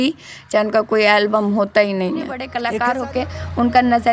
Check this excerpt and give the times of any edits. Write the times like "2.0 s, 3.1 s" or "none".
2.5 s